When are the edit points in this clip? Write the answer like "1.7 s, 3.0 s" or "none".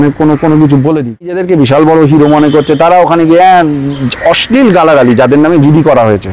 1.4 s